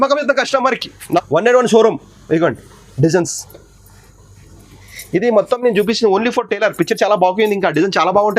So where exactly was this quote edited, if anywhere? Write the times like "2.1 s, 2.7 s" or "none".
1.2 s